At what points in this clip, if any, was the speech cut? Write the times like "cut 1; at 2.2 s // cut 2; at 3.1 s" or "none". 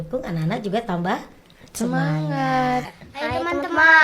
cut 1; at 2.9 s